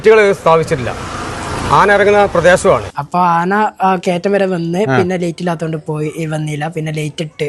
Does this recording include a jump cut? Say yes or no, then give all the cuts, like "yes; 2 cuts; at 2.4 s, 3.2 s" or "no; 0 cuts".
yes; 1 cut; at 2.9 s